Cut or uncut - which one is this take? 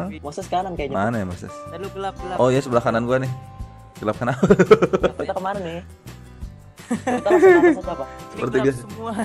cut